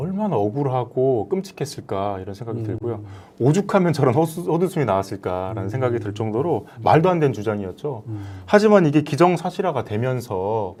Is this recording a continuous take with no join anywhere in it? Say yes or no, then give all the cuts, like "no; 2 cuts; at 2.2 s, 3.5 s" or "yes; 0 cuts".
yes; 0 cuts